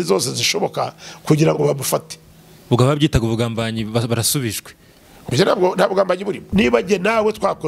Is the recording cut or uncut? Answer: cut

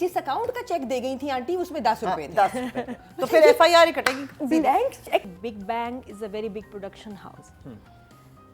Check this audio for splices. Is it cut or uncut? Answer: cut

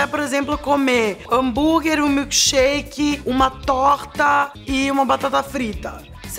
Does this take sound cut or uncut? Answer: cut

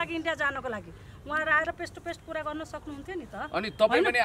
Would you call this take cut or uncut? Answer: uncut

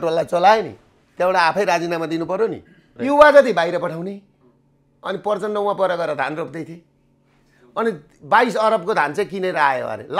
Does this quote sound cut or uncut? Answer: cut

